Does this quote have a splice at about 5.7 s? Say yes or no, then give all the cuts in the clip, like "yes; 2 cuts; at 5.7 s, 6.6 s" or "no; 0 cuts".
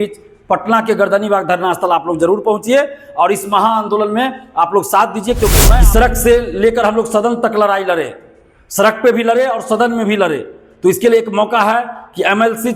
yes; 1 cut; at 5.7 s